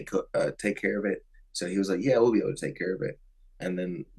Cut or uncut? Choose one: uncut